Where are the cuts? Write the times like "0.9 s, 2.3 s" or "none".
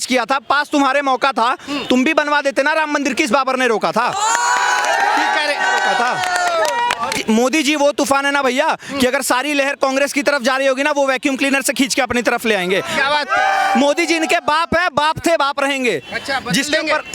7.2 s